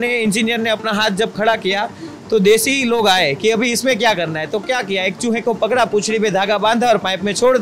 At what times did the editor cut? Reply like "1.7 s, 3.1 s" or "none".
none

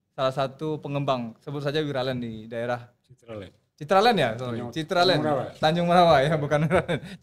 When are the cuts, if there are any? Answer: none

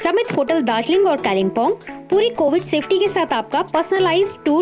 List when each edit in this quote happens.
none

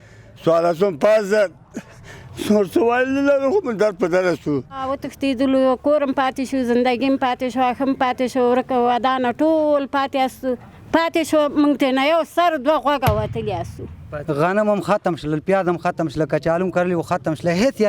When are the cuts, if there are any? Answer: 4.9 s, 14.1 s

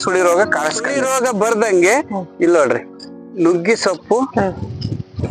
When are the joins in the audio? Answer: 1.0 s

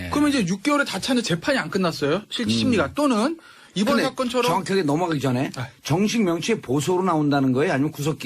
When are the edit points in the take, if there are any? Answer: none

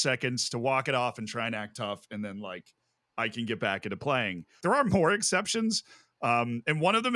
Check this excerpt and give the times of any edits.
4.6 s

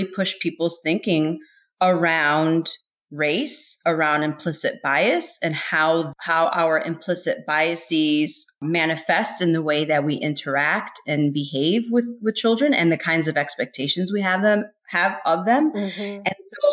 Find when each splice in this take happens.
none

